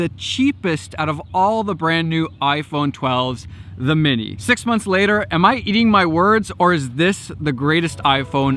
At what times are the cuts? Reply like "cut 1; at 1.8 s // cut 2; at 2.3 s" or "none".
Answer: cut 1; at 4.3 s